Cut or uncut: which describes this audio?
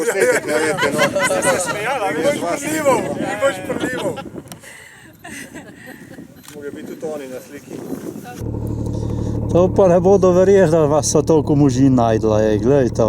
cut